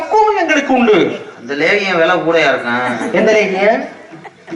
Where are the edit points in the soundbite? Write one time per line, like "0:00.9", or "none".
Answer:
none